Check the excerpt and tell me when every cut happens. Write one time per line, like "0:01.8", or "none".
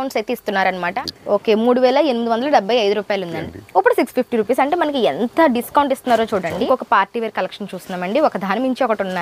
0:00.9
0:03.3
0:06.6